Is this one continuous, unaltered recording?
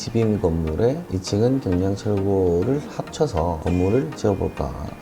yes; 0 cuts

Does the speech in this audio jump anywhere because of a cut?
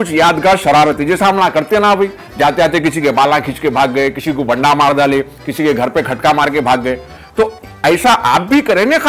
no; 0 cuts

